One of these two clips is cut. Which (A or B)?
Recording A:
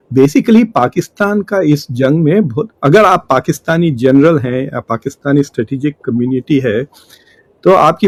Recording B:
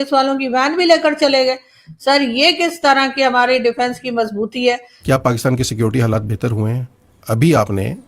B